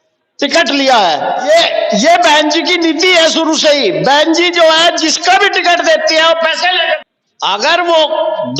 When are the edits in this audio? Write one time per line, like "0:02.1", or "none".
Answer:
0:01.4
0:07.0